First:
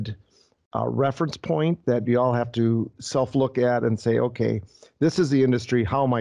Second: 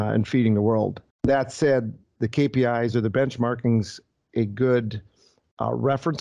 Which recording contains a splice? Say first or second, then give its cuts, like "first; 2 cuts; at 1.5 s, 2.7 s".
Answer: second; 1 cut; at 1.0 s